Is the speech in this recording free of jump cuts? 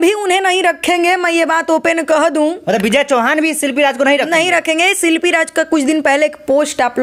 yes; 0 cuts

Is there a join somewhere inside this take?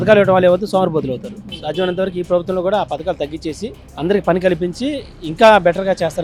no; 0 cuts

